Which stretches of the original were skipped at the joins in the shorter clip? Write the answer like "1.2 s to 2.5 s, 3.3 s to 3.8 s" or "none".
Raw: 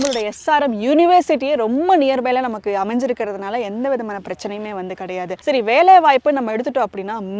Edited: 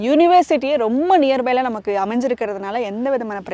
none